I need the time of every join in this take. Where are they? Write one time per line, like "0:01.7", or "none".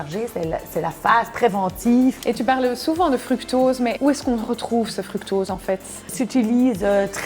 0:02.2
0:04.0
0:06.1